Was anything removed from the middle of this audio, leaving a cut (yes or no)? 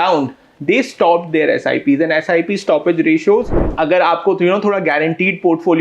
yes